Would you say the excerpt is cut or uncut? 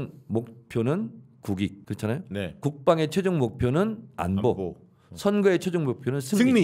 cut